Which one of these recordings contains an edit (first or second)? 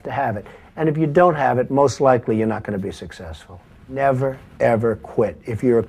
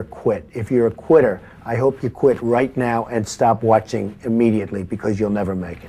first